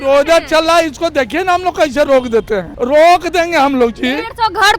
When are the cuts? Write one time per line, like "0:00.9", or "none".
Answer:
0:02.7